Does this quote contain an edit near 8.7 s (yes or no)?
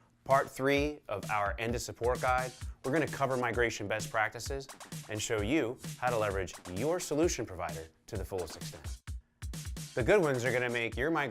yes